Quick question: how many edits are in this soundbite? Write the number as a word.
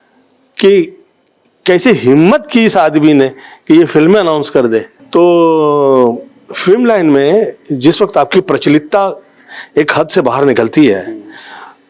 one